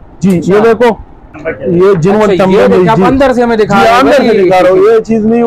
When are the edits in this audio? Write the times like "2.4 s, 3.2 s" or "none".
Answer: 1.5 s